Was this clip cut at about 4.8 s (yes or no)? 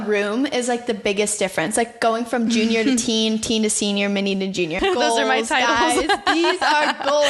yes